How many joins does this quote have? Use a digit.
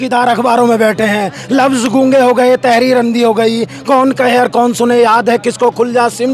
0